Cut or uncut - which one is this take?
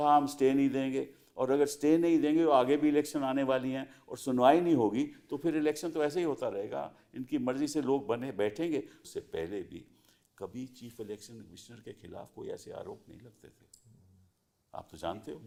uncut